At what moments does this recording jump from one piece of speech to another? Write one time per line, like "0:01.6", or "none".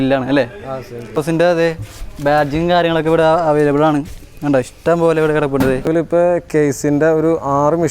0:01.2
0:05.9